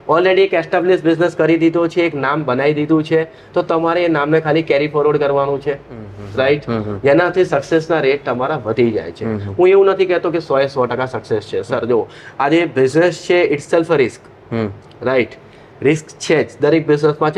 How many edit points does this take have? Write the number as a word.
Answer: zero